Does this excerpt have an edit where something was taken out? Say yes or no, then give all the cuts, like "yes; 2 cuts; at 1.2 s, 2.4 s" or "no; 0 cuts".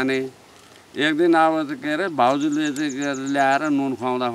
no; 0 cuts